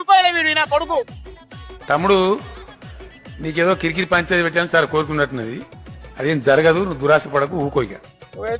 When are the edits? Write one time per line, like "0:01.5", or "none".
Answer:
none